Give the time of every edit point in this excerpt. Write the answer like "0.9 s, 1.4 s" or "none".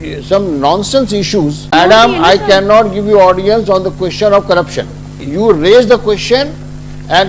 1.7 s, 5.2 s